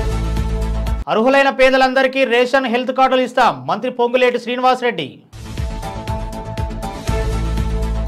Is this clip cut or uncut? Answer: cut